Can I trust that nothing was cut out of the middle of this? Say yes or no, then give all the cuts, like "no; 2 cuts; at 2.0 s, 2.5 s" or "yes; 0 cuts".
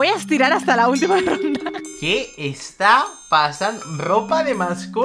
yes; 0 cuts